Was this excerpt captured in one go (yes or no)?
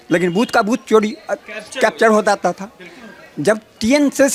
yes